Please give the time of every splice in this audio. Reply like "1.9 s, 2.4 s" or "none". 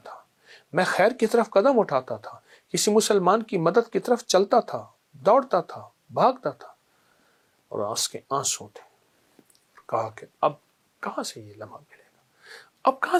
none